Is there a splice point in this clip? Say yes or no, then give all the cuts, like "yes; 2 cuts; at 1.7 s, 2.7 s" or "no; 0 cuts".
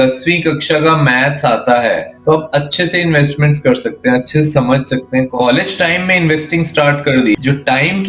yes; 3 cuts; at 2.1 s, 5.3 s, 7.4 s